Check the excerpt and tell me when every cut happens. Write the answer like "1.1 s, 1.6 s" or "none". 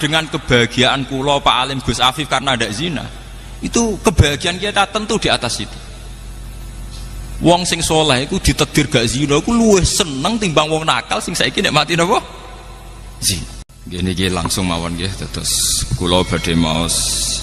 13.7 s